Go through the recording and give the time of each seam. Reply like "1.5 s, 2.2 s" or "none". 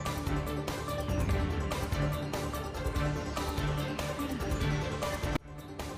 none